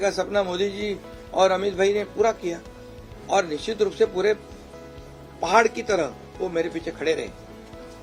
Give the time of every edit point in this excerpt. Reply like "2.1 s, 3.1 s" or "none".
none